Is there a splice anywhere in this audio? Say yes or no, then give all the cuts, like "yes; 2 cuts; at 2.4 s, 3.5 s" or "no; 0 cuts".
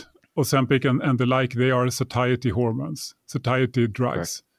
no; 0 cuts